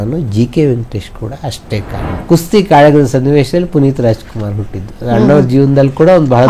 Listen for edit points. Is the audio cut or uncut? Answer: cut